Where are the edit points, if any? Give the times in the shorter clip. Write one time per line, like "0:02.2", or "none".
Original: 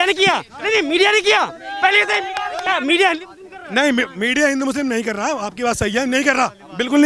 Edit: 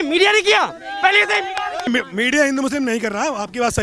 0:01.9